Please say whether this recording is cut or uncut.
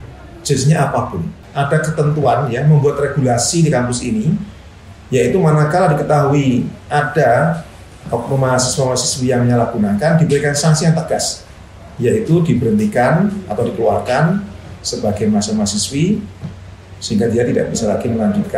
cut